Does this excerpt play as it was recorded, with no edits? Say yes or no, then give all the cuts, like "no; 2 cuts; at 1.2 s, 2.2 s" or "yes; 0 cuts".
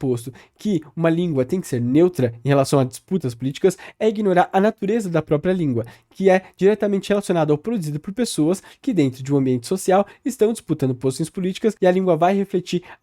yes; 0 cuts